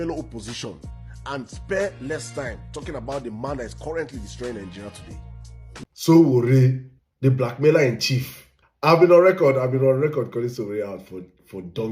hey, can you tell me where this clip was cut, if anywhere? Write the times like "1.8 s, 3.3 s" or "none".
5.7 s